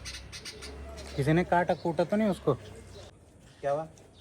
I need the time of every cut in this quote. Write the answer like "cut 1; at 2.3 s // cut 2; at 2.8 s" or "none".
cut 1; at 3.1 s